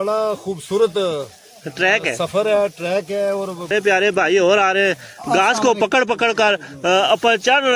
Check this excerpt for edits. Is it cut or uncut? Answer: cut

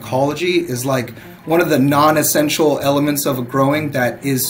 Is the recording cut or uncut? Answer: uncut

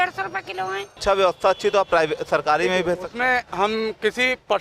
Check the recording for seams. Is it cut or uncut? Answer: cut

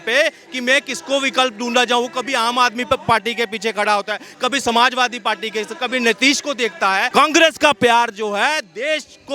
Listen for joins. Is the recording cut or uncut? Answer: cut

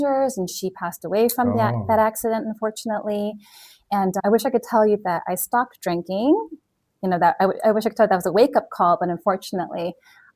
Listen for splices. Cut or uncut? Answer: uncut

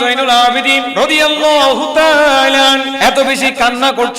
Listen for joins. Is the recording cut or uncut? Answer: cut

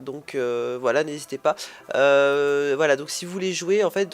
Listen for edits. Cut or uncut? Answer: cut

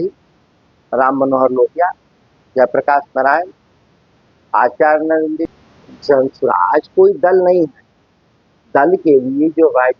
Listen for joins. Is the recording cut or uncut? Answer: cut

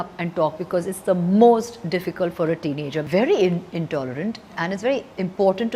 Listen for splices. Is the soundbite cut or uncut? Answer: cut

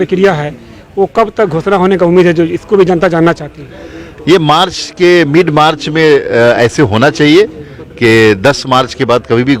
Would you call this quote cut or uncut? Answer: uncut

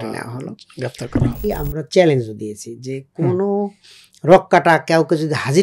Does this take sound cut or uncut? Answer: cut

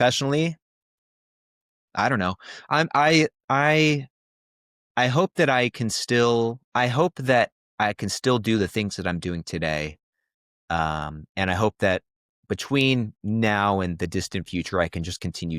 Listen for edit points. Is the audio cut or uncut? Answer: uncut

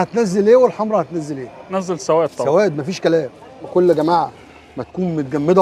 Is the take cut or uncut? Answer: cut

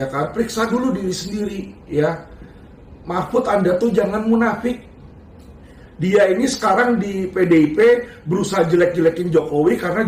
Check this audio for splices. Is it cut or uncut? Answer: uncut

